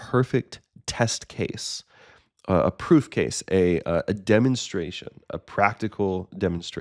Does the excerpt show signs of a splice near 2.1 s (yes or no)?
no